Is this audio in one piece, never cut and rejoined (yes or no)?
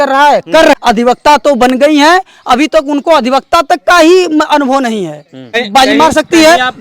no